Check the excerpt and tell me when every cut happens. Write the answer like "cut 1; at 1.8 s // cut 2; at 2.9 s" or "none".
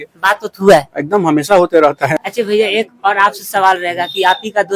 cut 1; at 2.2 s

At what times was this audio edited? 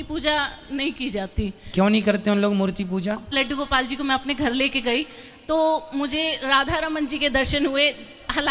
cut 1; at 3.3 s

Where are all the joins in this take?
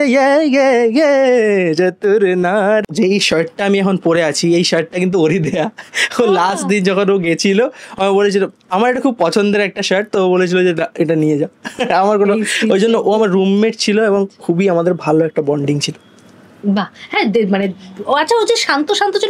cut 1; at 2.9 s

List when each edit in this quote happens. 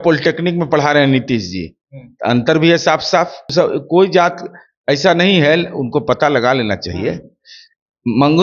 cut 1; at 3.5 s

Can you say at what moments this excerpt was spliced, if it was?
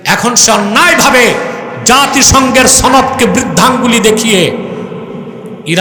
none

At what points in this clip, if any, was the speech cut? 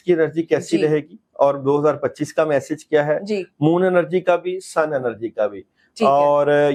none

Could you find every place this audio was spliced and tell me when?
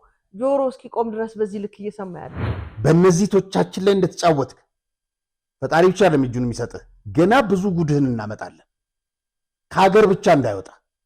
cut 1; at 2.4 s

